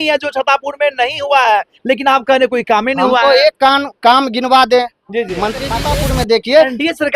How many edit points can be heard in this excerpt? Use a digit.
1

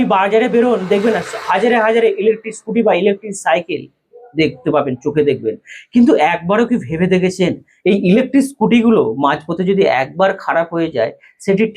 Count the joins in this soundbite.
0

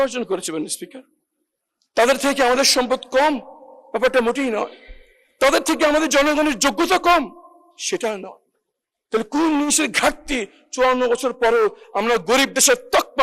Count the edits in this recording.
0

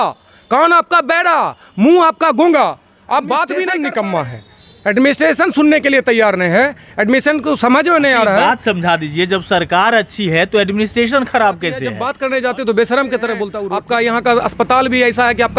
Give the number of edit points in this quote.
3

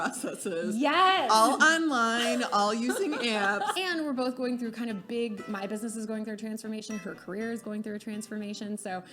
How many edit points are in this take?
1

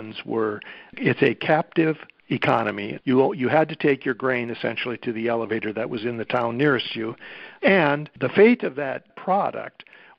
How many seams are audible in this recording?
4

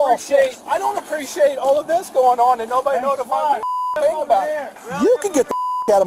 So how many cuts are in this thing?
1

